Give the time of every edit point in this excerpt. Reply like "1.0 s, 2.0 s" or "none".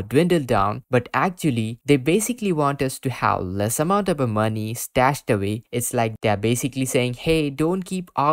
1.7 s

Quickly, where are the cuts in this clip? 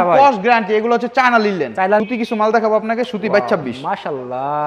2.0 s

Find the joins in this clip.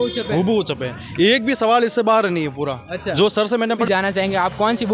3.8 s

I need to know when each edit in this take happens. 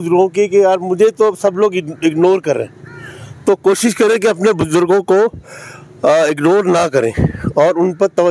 none

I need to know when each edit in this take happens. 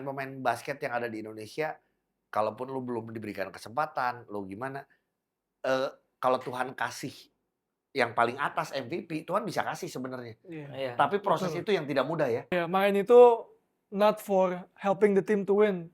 12.6 s

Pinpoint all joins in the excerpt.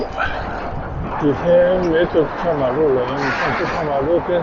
1.2 s

